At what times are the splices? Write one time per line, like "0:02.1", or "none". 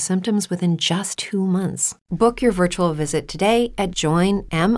none